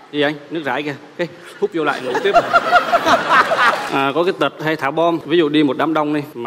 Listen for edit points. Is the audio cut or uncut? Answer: cut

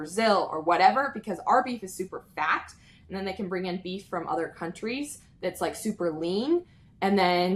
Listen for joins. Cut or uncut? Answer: uncut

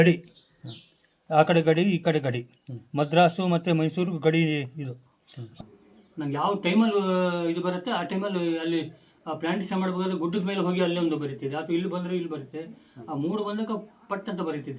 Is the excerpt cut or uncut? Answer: cut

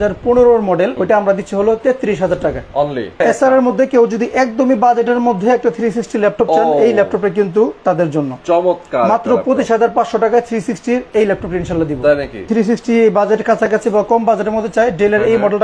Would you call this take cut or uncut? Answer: cut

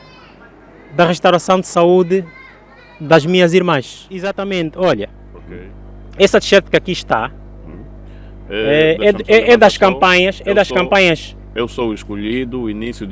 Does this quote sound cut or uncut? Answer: cut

